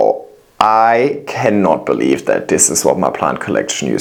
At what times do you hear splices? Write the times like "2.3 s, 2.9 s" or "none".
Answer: none